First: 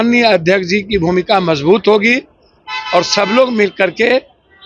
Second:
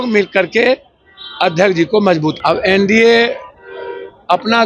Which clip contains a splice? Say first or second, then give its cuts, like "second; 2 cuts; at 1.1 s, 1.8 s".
second; 1 cut; at 2.4 s